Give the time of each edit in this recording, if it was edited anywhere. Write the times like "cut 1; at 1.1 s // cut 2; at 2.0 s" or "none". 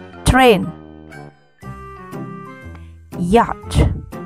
cut 1; at 1.0 s // cut 2; at 2.7 s